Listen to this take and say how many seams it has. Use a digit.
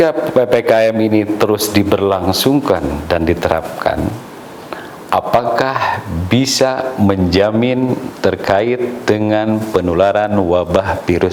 0